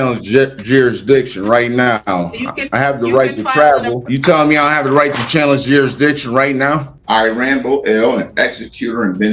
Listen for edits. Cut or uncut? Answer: cut